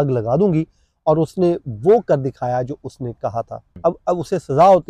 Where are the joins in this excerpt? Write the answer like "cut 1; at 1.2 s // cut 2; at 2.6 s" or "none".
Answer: cut 1; at 3.7 s